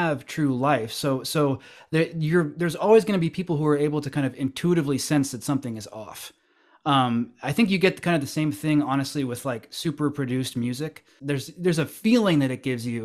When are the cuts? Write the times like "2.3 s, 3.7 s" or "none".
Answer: 11.1 s